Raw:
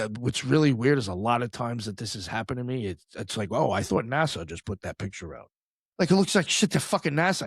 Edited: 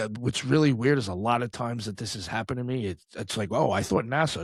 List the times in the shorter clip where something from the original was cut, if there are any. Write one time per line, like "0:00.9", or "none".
none